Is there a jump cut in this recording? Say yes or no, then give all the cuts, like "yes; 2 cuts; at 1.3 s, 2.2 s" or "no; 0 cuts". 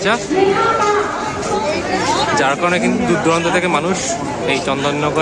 no; 0 cuts